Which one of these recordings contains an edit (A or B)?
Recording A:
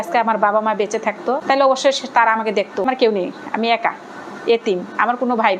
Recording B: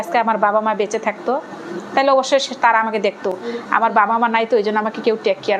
A